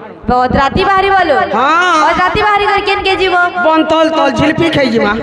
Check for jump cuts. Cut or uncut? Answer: uncut